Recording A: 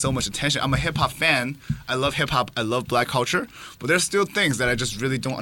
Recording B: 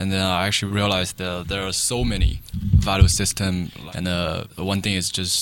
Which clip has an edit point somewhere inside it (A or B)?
B